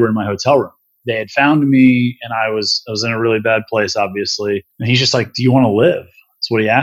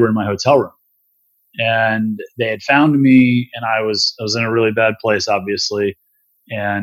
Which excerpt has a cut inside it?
first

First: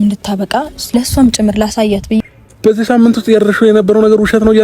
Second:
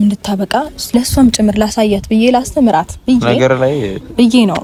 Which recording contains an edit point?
first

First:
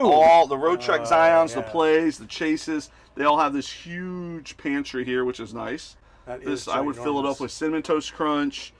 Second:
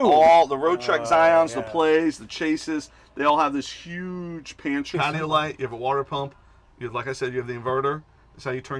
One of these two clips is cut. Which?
second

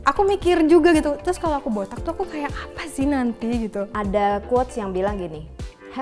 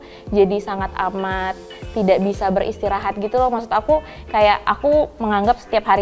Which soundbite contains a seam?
first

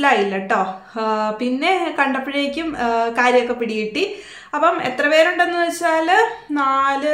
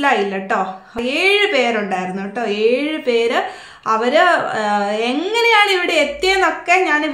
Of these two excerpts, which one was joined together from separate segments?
second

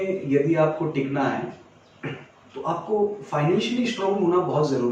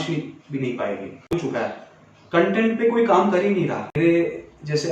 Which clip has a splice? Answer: second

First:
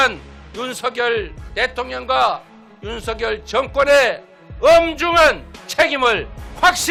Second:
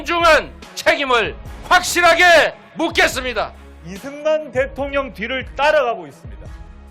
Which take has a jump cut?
second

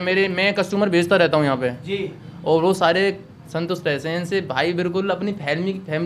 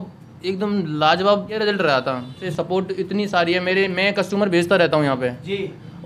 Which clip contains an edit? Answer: second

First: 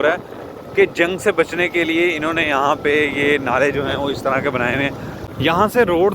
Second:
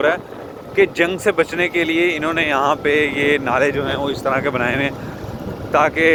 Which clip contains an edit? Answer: first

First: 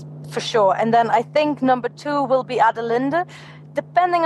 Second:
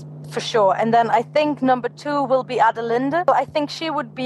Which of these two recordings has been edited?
second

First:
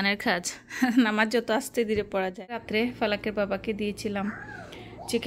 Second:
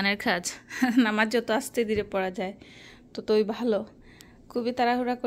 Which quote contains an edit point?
first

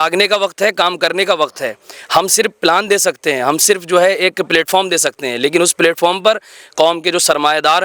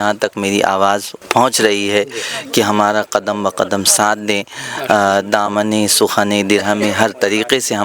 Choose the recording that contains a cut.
second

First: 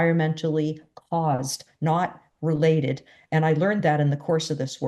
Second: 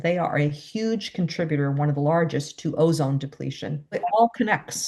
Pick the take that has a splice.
second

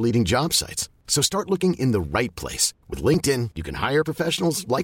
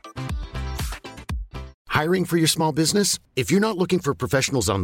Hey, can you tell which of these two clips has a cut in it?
second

